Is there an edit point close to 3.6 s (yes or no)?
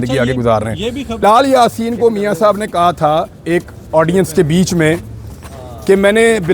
no